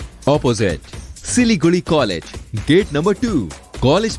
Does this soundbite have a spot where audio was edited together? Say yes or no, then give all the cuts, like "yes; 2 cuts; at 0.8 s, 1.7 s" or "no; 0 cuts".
no; 0 cuts